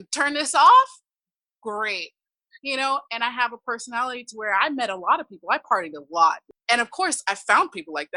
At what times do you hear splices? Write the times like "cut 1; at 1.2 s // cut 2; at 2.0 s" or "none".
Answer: cut 1; at 6.5 s